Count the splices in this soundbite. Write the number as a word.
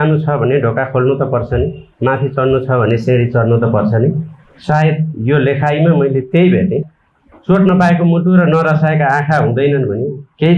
one